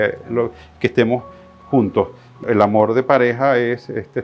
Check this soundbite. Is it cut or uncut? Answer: cut